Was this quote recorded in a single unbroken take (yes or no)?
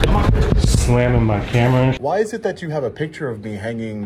no